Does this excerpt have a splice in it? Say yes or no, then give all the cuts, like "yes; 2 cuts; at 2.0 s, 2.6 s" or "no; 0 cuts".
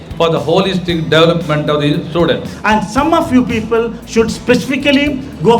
yes; 1 cut; at 2.5 s